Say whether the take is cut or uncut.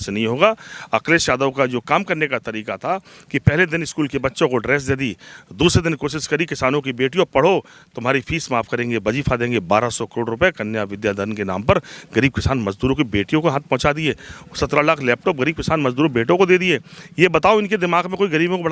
uncut